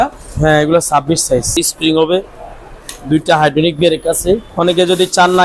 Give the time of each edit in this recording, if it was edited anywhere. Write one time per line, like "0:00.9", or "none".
0:01.5
0:04.5